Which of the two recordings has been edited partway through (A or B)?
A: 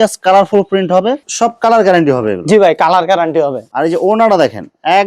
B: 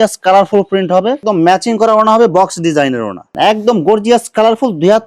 B